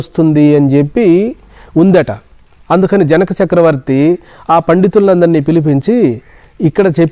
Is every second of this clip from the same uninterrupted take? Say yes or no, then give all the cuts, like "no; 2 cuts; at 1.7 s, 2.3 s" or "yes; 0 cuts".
yes; 0 cuts